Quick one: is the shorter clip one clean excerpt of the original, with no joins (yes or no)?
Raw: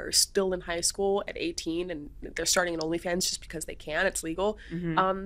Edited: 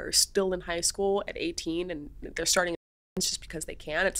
yes